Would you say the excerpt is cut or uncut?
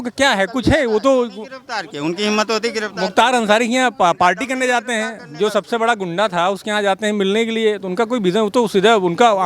uncut